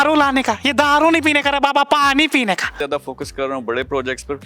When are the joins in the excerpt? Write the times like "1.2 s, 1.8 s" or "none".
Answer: 2.8 s

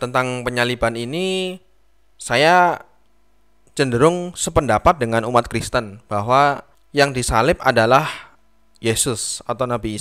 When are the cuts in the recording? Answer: none

